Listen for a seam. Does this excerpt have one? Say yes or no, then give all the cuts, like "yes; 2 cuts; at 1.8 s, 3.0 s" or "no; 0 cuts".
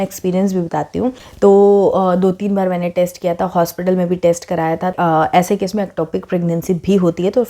yes; 2 cuts; at 1.2 s, 5.0 s